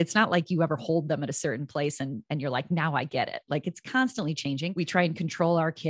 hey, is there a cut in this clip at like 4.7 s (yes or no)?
yes